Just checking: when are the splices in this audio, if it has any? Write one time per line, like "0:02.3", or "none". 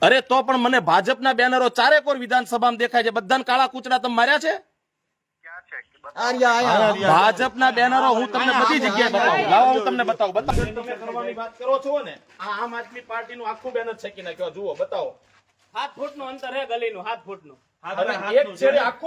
0:10.5